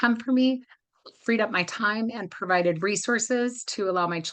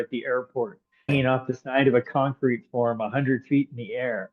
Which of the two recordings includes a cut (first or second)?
second